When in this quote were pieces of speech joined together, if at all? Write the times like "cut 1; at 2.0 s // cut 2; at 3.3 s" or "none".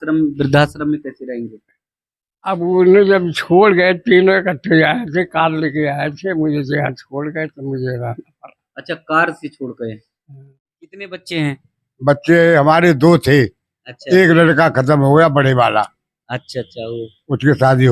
cut 1; at 11.1 s